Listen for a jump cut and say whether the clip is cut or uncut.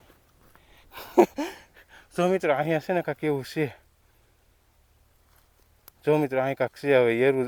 uncut